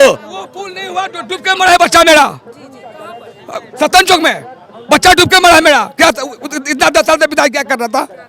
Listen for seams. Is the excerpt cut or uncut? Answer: uncut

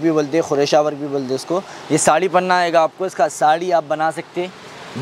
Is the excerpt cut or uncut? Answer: uncut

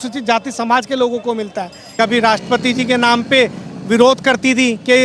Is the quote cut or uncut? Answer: cut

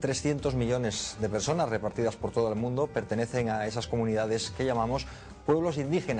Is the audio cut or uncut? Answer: uncut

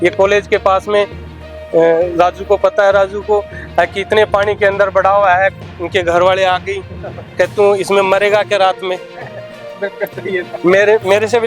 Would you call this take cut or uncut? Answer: uncut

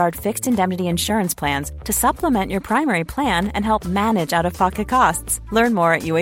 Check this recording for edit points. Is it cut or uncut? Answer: uncut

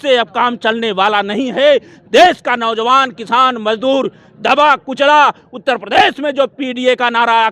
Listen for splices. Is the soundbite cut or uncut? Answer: uncut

